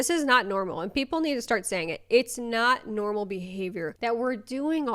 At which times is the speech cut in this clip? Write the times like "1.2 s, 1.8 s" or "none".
3.9 s